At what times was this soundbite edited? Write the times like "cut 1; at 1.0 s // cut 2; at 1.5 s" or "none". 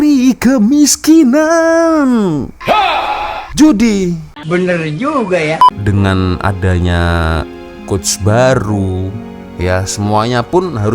cut 1; at 5.8 s